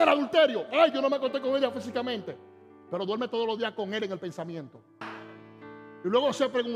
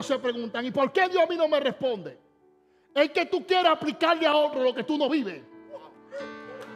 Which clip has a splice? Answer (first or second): first